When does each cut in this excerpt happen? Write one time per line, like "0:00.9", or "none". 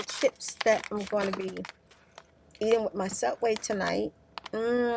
none